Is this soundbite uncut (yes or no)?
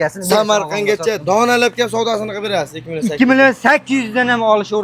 yes